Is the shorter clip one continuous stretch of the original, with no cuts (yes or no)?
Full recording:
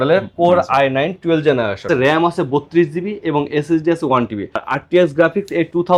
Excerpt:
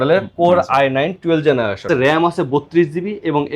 yes